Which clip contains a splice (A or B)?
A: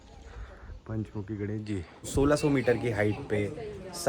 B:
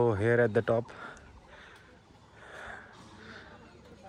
A